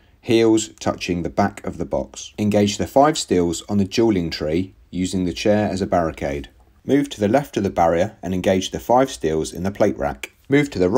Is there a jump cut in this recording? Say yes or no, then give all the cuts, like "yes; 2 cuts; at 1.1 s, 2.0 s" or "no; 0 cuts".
yes; 1 cut; at 2.2 s